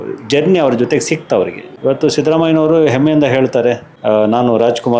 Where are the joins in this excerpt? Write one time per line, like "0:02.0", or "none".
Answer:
0:01.6
0:03.9